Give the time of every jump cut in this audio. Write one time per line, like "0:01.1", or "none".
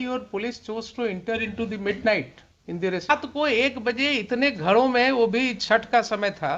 0:03.1